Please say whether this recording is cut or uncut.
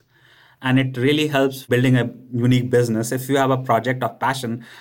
cut